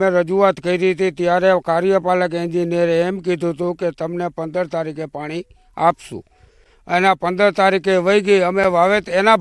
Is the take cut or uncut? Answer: uncut